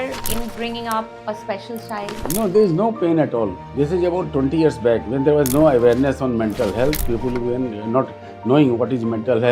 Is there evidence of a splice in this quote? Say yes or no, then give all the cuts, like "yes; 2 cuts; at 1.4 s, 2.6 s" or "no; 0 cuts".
yes; 1 cut; at 3.6 s